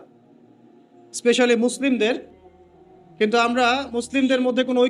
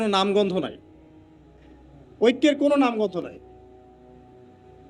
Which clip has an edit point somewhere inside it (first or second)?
second